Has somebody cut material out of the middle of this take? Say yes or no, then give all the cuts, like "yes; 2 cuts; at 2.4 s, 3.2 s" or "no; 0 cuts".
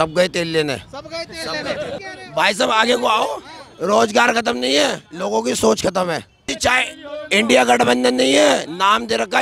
yes; 2 cuts; at 2.0 s, 6.4 s